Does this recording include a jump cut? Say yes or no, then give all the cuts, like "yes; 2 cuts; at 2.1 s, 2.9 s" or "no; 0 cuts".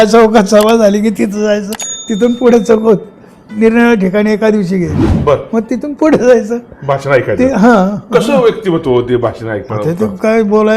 no; 0 cuts